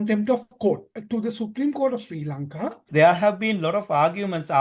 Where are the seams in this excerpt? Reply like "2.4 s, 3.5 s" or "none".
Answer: 0.9 s, 2.9 s